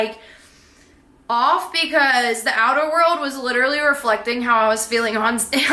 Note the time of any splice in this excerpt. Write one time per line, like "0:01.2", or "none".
none